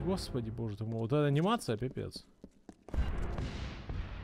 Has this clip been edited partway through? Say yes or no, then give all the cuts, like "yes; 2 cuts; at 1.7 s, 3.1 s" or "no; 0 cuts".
no; 0 cuts